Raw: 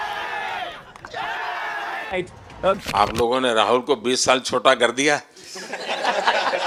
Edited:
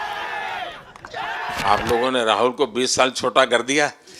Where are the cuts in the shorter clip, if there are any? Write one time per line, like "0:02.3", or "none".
0:01.6

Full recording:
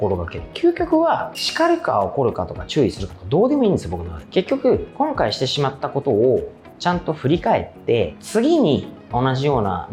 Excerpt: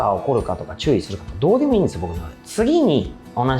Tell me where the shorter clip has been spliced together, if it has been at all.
0:02.4

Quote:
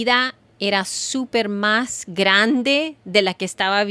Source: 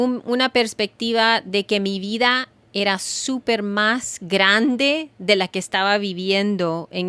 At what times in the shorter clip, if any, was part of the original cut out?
none

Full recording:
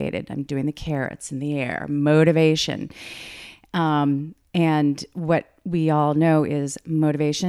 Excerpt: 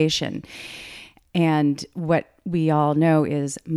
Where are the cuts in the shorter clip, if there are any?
0:01.1

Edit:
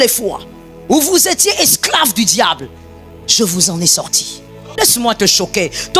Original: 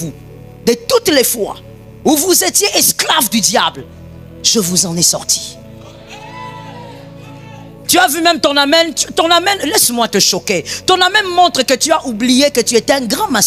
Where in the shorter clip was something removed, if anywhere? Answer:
0:04.8

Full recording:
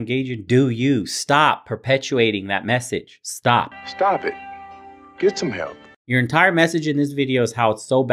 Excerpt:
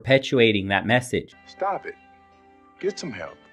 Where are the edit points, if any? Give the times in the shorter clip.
0:01.4

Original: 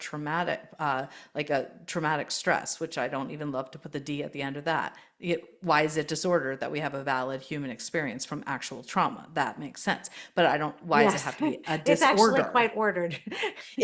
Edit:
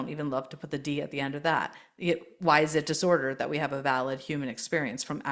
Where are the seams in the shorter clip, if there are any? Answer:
none

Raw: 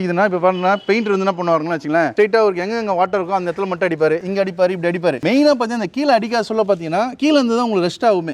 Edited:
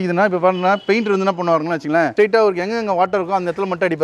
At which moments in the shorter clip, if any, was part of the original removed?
none

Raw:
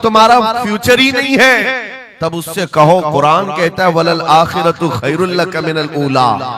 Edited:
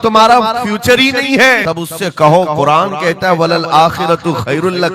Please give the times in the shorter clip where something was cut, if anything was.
0:01.6

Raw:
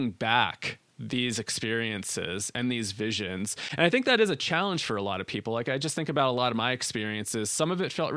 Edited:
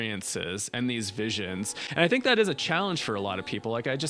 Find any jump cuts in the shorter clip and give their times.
none

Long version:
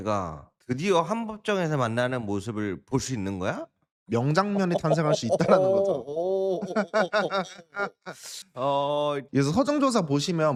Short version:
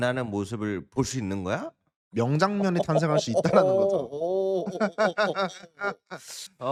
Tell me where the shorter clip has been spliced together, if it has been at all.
none

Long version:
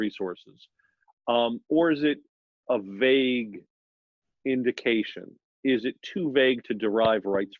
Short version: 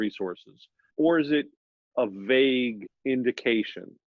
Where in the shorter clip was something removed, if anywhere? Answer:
0:00.9
0:02.9

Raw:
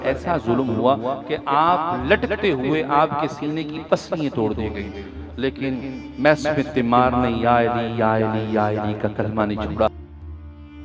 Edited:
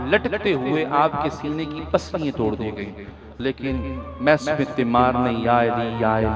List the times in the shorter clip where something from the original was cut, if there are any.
none

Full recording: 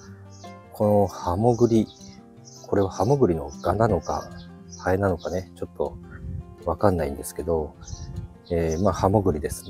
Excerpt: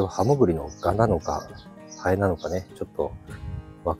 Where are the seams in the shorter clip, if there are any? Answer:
none

